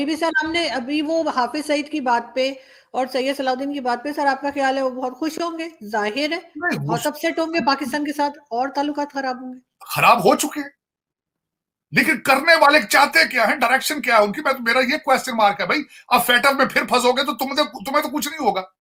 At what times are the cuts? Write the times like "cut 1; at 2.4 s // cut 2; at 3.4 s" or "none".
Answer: none